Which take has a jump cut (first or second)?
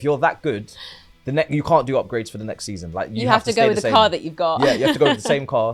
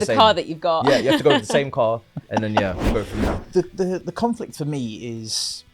second